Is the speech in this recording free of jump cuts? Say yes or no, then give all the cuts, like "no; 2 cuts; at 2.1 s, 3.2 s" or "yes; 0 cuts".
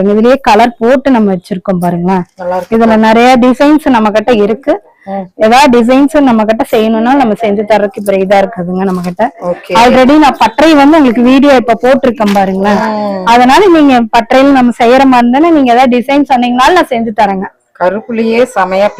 yes; 0 cuts